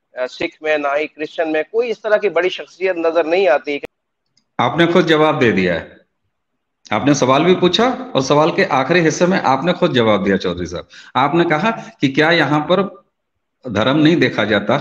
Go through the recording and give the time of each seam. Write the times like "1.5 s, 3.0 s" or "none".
3.8 s